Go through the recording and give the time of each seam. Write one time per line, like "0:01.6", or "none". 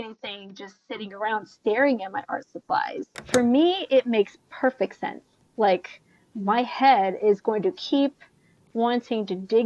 0:03.2